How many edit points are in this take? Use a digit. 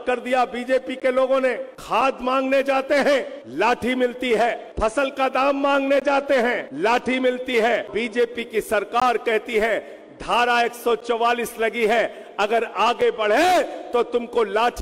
5